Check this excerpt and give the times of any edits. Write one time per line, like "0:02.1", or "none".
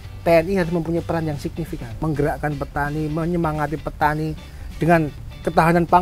0:01.9
0:04.5